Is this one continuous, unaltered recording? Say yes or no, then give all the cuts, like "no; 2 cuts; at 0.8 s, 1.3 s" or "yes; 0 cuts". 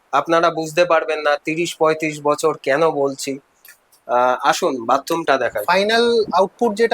no; 1 cut; at 5.6 s